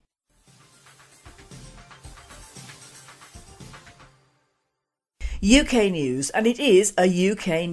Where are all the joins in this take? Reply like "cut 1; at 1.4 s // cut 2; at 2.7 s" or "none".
cut 1; at 3.5 s